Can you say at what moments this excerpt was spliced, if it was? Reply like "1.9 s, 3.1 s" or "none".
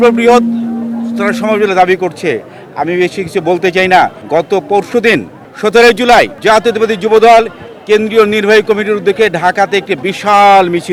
none